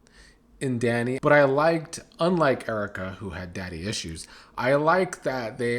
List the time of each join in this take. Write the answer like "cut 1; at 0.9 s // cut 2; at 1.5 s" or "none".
cut 1; at 1.2 s